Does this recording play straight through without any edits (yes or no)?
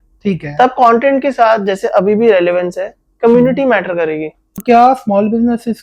no